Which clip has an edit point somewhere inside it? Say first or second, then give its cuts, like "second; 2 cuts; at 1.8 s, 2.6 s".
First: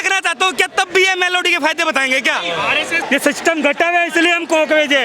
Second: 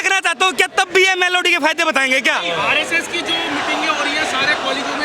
first; 1 cut; at 3.0 s